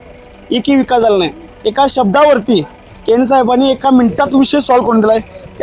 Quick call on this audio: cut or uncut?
uncut